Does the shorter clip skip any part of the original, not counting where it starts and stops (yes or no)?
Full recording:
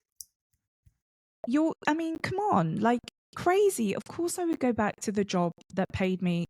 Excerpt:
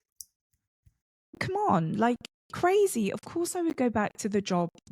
yes